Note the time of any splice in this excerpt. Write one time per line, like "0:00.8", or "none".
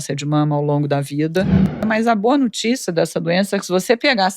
0:01.8